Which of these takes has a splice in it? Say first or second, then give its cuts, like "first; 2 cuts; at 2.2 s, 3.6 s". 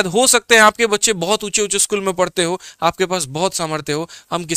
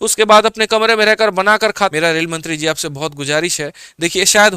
second; 1 cut; at 1.9 s